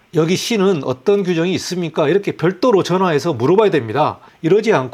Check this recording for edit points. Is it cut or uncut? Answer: uncut